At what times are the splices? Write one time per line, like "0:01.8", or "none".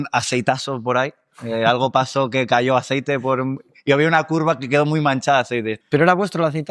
0:05.7